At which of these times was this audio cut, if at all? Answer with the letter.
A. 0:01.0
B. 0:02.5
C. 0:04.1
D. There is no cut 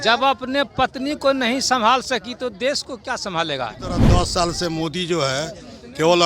C